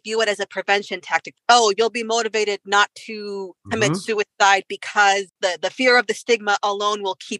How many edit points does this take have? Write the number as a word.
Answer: two